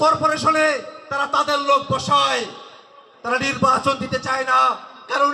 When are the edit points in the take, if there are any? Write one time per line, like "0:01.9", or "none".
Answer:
none